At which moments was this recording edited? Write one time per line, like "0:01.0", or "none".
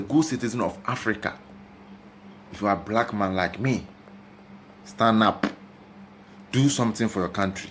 none